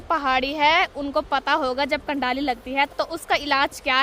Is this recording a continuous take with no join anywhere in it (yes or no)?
yes